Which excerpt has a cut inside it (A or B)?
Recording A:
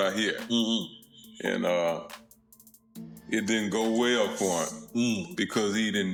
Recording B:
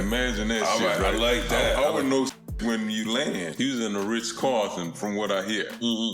B